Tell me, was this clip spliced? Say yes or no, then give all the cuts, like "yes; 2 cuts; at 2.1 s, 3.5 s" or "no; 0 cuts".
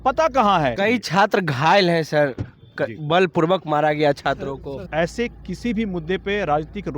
yes; 2 cuts; at 0.8 s, 4.7 s